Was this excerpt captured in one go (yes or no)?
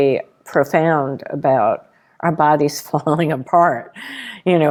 yes